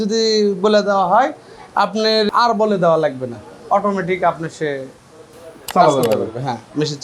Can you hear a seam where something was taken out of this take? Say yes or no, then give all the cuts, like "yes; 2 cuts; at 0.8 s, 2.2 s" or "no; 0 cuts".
yes; 1 cut; at 2.3 s